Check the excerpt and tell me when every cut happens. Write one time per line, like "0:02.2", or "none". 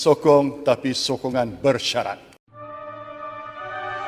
0:02.3